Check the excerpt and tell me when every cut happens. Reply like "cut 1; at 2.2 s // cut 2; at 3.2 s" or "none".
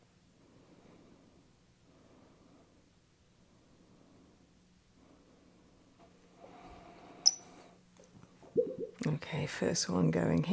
cut 1; at 6.0 s